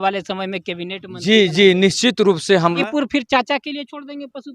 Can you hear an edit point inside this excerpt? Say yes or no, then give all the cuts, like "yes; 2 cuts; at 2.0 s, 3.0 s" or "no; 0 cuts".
yes; 1 cut; at 2.8 s